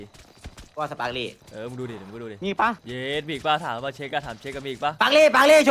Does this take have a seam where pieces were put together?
yes; 2 cuts; at 1.4 s, 2.9 s

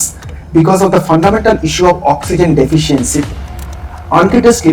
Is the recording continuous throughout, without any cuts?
no; 1 cut; at 3.7 s

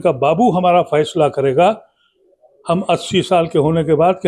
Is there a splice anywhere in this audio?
no; 0 cuts

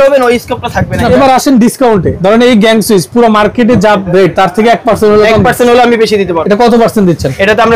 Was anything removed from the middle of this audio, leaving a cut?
yes; 3 cuts; at 1.1 s, 2.1 s, 6.4 s

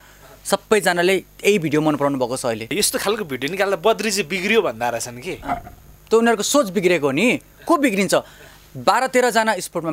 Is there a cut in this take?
yes; 1 cut; at 2.7 s

